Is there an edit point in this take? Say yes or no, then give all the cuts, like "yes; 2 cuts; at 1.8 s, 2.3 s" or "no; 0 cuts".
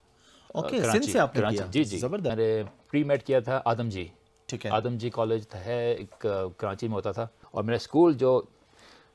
yes; 2 cuts; at 2.3 s, 7.4 s